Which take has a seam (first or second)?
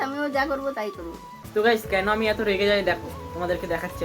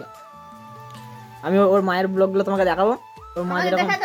first